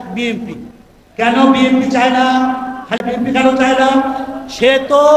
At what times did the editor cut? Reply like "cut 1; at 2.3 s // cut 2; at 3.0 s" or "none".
cut 1; at 3.0 s